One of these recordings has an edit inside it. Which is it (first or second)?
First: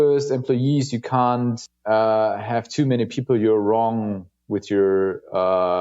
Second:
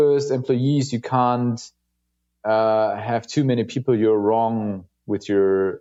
first